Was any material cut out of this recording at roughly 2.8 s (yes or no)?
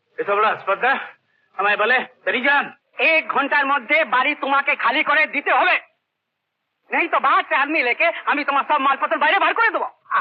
yes